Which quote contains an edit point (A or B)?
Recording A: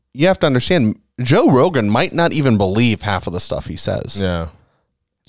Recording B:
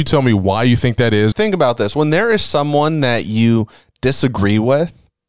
B